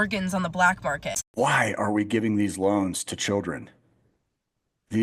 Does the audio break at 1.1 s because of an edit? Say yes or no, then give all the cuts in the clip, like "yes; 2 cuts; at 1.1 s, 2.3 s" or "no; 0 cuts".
yes; 1 cut; at 1.1 s